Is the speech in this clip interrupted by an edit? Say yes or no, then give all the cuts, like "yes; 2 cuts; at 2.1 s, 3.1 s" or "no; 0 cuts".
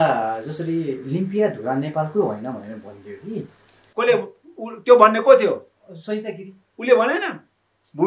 no; 0 cuts